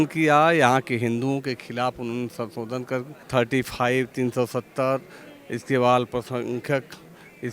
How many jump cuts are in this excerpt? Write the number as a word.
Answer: one